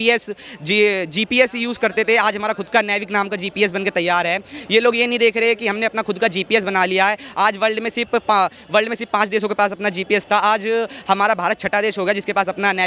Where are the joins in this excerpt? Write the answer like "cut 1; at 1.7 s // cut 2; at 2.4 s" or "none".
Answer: none